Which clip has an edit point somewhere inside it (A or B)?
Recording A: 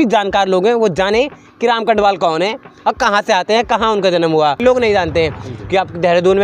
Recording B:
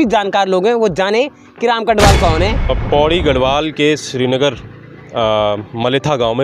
B